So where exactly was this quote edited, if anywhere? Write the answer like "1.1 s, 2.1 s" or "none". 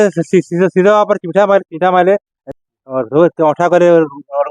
2.4 s